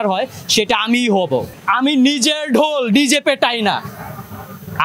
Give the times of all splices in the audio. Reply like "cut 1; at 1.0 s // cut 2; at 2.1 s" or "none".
cut 1; at 1.5 s